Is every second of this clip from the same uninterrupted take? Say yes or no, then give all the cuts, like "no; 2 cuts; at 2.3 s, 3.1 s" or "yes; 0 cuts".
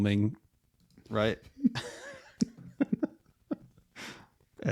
yes; 0 cuts